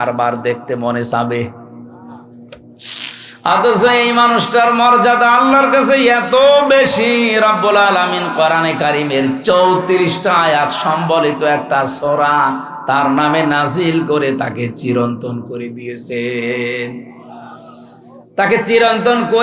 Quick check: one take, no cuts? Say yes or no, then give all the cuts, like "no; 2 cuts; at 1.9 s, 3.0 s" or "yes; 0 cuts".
yes; 0 cuts